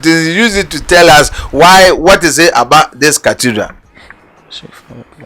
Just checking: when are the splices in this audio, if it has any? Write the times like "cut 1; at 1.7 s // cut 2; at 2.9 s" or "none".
none